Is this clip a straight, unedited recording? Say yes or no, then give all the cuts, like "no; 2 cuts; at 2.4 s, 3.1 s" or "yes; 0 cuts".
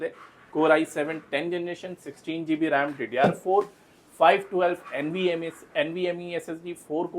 yes; 0 cuts